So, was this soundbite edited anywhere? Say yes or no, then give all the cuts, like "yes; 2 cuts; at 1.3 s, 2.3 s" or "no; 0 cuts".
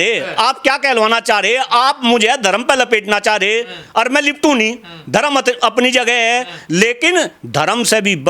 no; 0 cuts